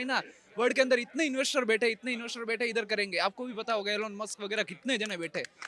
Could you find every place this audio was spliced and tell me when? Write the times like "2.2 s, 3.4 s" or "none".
none